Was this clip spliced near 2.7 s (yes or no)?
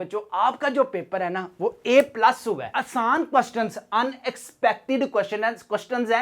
yes